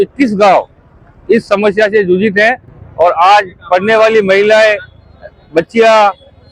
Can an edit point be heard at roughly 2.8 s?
no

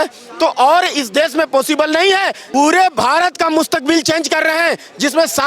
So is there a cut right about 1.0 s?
no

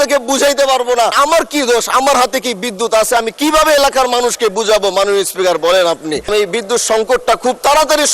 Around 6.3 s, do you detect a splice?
yes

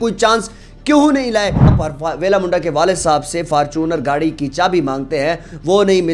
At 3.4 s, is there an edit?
no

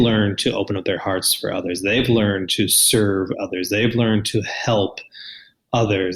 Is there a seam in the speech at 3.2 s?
no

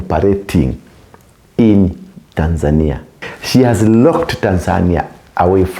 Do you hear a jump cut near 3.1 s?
yes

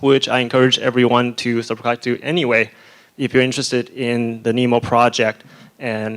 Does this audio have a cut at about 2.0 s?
yes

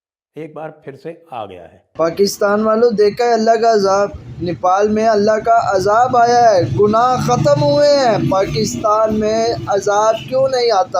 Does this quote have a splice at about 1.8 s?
yes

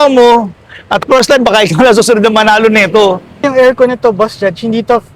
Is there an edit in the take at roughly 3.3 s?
yes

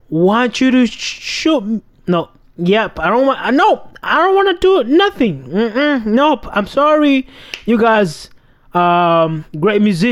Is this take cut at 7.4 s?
no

